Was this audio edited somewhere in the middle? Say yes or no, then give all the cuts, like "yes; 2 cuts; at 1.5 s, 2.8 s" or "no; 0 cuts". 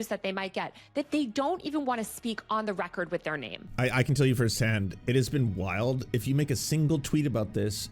yes; 1 cut; at 3.6 s